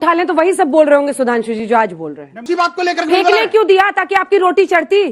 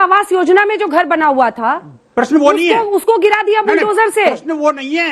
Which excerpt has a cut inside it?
first; 1 cut; at 2.4 s

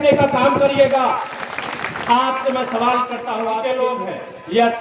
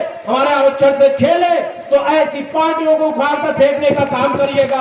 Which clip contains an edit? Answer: first; 1 cut; at 3.6 s

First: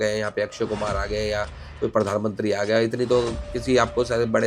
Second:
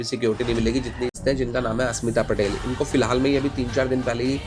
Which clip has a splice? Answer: second; 1 cut; at 1.2 s

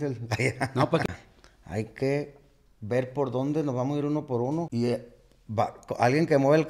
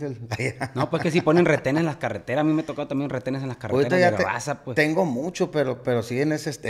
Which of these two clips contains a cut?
first; 2 cuts; at 1.0 s, 4.7 s

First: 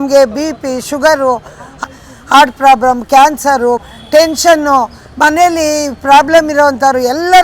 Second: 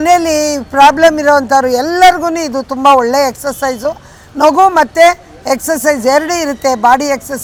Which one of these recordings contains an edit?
first; 2 cuts; at 1.8 s, 3.9 s

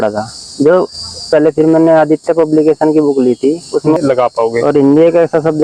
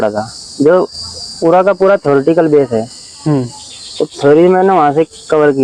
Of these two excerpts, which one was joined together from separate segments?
first; 2 cuts; at 1.3 s, 4.0 s

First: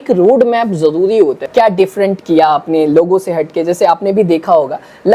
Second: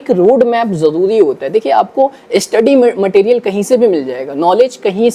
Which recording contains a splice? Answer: first; 1 cut; at 1.5 s

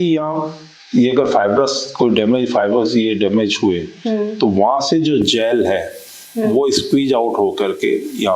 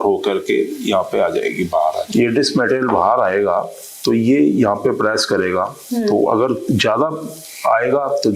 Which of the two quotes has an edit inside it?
second; 1 cut; at 2.0 s

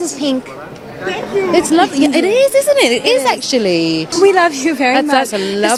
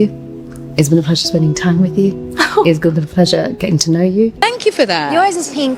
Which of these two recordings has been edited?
second; 2 cuts; at 3.5 s, 4.4 s

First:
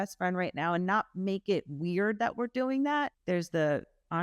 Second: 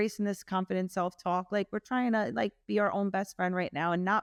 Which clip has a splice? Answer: first; 1 cut; at 3.2 s

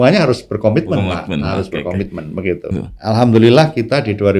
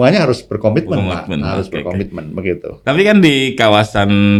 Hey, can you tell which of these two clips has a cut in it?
first; 1 cut; at 2.7 s

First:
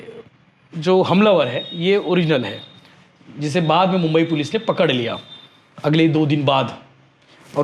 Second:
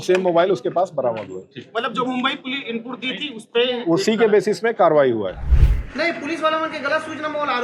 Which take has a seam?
second; 1 cut; at 5.4 s

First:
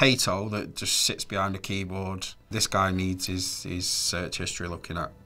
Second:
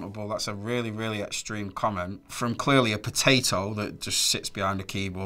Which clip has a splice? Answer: second; 1 cut; at 2.2 s

